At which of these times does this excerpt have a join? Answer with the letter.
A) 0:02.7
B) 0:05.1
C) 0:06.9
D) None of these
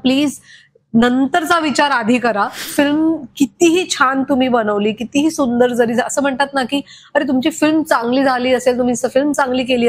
A